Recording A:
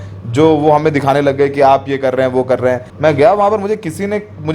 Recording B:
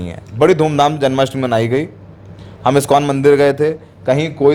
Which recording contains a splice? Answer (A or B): A